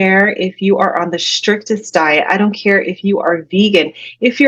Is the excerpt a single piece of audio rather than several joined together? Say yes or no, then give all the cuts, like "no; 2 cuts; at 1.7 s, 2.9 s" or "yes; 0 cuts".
yes; 0 cuts